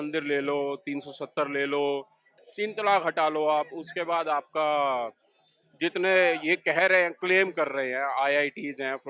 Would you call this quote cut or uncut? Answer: uncut